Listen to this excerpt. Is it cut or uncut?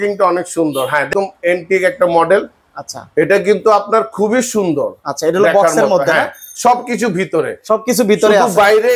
cut